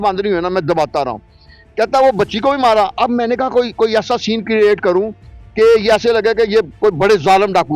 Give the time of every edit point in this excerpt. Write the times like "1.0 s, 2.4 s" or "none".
none